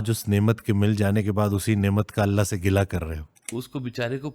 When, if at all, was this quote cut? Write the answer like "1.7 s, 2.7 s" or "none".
3.4 s